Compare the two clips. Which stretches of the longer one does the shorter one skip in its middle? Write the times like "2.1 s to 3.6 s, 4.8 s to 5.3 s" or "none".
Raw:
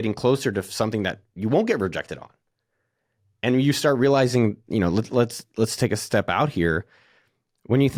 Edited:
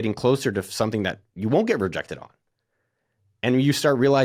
none